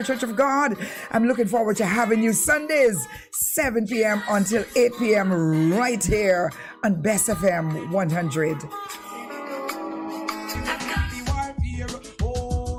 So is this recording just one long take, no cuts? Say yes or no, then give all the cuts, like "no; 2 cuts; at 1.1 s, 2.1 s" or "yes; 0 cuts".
yes; 0 cuts